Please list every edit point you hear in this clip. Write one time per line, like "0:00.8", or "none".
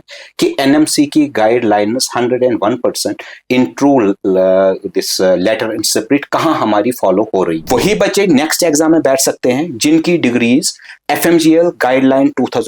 0:07.6

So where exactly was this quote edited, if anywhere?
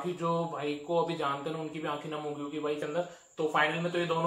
0:02.8

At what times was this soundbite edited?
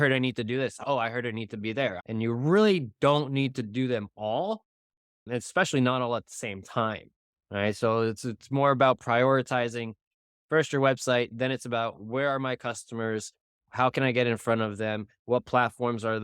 0:00.8
0:02.0

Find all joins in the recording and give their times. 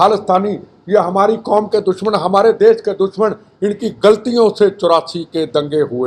none

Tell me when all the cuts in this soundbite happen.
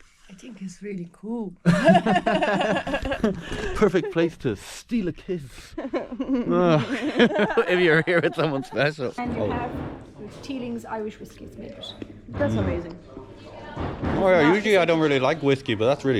0:09.1

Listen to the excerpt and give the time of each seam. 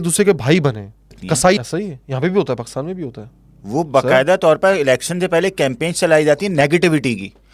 0:01.6

